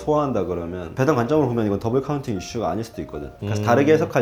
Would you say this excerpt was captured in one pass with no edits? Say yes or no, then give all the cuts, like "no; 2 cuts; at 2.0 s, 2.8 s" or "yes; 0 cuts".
yes; 0 cuts